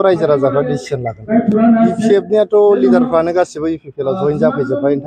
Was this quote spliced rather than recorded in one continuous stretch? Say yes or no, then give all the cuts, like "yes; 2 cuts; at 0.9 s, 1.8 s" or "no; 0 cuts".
yes; 1 cut; at 1.2 s